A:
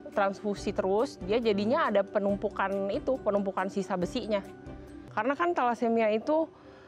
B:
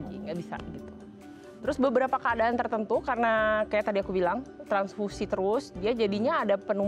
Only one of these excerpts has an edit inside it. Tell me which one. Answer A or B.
A